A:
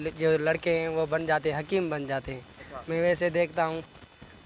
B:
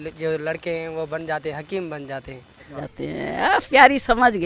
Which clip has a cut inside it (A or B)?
A